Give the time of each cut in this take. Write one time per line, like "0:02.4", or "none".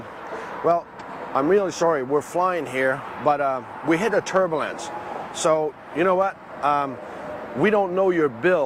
none